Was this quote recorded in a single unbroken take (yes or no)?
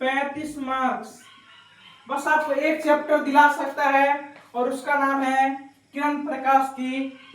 yes